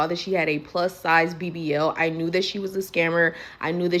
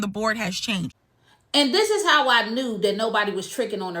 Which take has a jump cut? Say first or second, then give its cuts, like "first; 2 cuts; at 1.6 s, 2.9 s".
second; 1 cut; at 1.1 s